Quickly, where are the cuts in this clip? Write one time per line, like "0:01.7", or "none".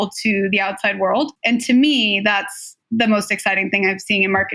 0:01.4